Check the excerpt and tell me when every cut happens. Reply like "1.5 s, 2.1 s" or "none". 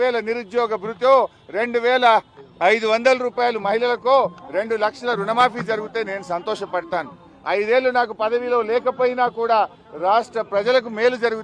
none